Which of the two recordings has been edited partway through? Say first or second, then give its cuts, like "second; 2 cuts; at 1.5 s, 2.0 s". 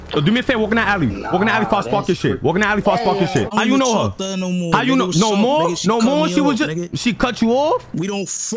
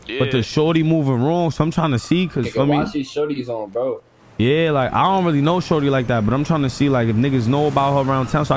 first; 1 cut; at 3.5 s